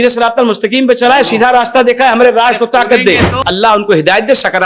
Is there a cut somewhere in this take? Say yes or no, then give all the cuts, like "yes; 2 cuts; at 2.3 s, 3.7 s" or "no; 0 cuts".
yes; 1 cut; at 3.3 s